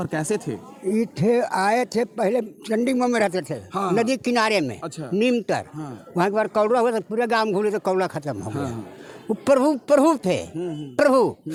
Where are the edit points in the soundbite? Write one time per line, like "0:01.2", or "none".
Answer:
none